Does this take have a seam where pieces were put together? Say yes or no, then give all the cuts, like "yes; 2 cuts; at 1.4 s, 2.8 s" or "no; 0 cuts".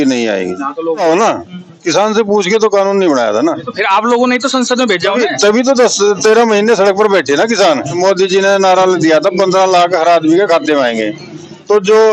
yes; 2 cuts; at 1.0 s, 8.0 s